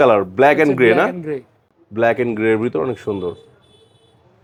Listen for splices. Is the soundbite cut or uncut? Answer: uncut